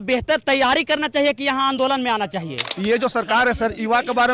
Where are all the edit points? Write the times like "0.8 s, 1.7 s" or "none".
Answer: 2.6 s